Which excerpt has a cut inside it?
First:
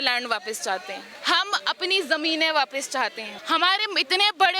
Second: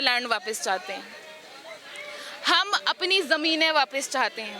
first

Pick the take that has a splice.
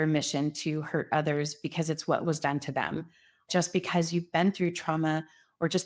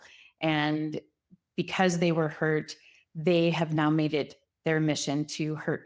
first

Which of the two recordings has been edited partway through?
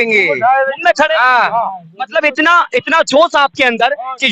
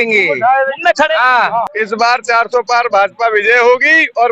second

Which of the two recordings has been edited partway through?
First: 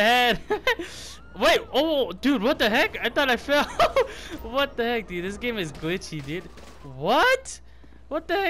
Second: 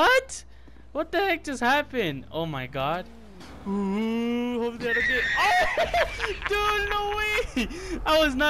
second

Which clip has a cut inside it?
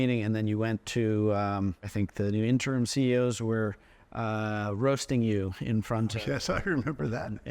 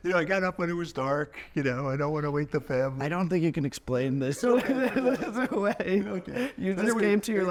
first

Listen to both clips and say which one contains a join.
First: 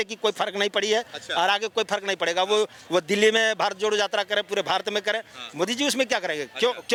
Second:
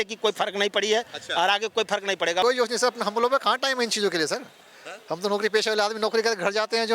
second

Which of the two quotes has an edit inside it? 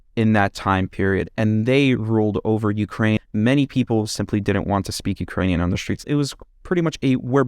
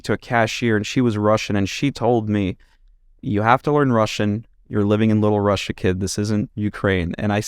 first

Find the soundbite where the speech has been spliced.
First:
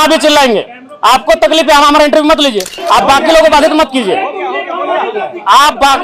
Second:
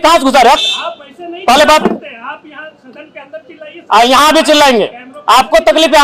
first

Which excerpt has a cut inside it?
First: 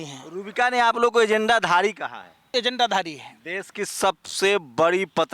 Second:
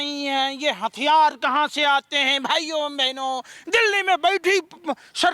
first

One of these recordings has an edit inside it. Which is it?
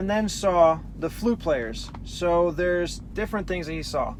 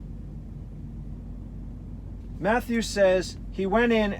second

